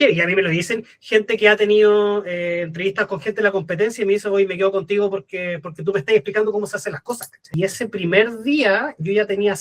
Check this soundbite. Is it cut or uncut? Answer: cut